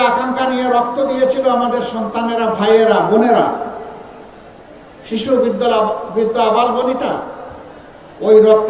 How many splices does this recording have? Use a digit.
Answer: 0